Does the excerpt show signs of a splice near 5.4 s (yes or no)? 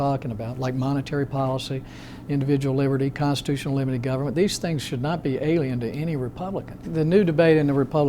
no